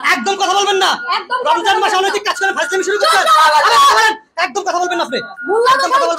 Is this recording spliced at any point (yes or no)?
no